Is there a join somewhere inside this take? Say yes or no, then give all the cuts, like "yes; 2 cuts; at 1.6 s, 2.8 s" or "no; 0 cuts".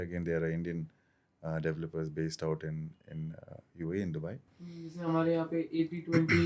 no; 0 cuts